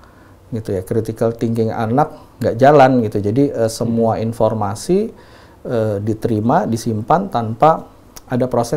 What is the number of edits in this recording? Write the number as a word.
zero